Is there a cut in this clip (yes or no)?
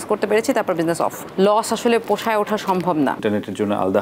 yes